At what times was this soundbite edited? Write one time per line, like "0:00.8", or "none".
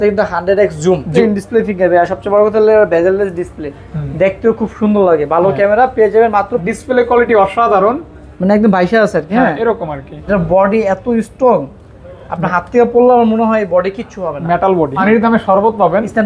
0:01.1
0:06.6
0:10.3
0:15.0